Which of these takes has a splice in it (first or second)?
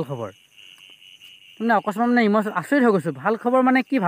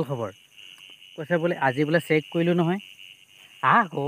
second